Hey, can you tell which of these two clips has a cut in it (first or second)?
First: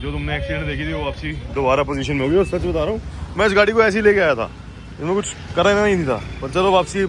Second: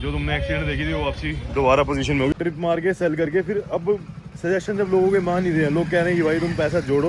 second